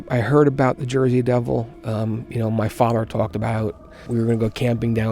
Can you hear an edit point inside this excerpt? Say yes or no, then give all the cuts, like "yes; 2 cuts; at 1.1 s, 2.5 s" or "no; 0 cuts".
yes; 1 cut; at 4.1 s